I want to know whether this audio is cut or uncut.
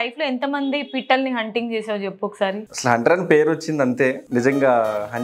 cut